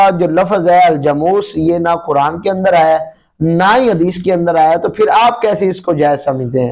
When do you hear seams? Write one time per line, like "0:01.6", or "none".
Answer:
none